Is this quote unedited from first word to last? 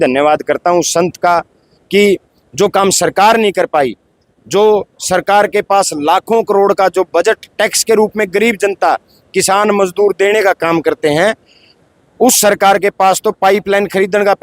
yes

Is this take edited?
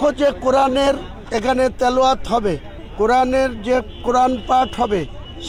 no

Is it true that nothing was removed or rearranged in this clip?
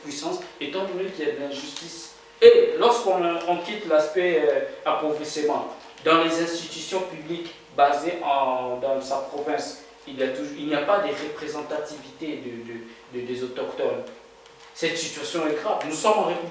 yes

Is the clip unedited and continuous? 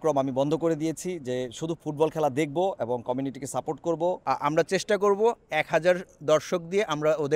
no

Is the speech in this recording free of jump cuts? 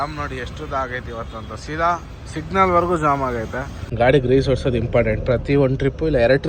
no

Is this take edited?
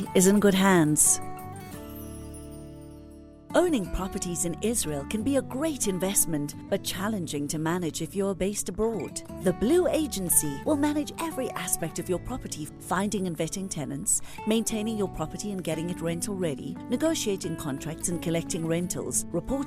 yes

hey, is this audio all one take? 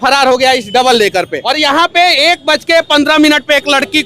no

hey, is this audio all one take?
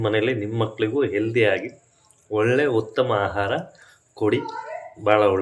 yes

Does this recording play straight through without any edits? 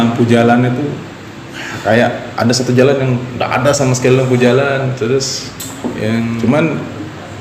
no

